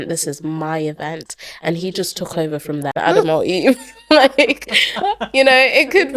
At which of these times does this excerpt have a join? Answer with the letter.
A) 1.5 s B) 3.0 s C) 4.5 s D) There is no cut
B